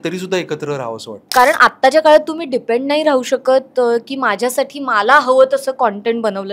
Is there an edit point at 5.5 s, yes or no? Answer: no